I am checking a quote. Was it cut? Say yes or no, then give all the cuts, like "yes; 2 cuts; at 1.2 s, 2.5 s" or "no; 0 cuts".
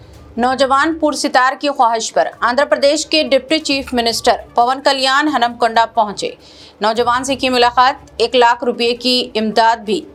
no; 0 cuts